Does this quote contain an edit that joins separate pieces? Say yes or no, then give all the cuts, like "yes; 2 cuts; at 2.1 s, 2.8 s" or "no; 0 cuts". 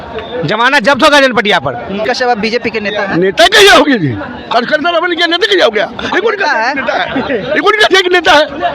yes; 1 cut; at 2.0 s